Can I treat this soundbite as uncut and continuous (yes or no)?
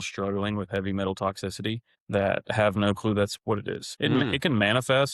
no